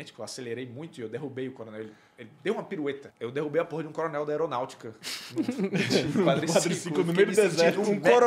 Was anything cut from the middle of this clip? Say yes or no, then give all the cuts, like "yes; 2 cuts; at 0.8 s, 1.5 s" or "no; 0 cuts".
yes; 1 cut; at 3.1 s